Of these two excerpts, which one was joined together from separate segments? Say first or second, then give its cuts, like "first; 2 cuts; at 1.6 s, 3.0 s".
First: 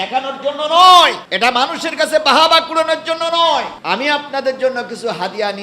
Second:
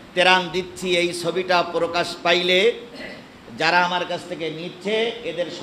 first; 2 cuts; at 1.2 s, 3.8 s